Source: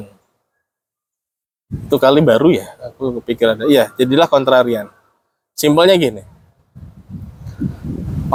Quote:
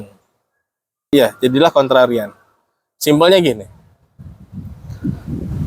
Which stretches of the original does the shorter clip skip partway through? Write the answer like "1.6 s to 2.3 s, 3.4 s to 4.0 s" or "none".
1.1 s to 3.7 s